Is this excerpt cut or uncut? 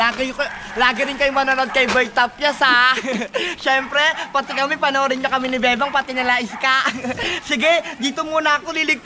uncut